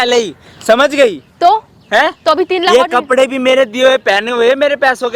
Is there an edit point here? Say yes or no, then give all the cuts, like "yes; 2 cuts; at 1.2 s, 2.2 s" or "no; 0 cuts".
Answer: no; 0 cuts